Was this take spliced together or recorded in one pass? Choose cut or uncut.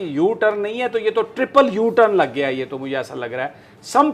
uncut